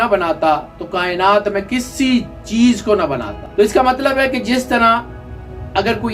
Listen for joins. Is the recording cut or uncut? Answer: cut